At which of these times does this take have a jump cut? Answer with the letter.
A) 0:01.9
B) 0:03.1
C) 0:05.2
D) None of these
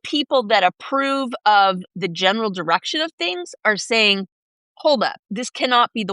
C